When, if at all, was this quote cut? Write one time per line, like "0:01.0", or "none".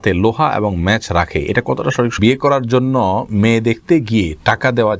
0:02.2

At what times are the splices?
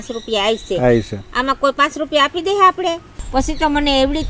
0:03.1

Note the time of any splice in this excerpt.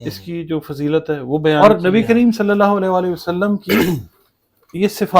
0:01.6

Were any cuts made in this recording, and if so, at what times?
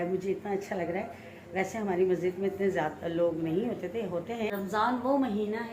0:04.5

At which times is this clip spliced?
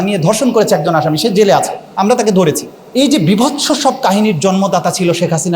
0:02.7

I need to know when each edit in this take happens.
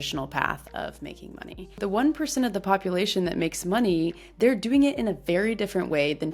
0:01.8
0:04.2

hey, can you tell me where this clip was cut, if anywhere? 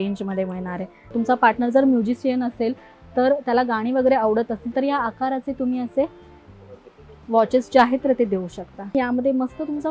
0:01.1
0:08.9

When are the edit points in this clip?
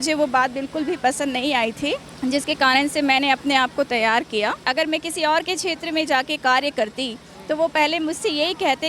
0:02.1
0:04.6

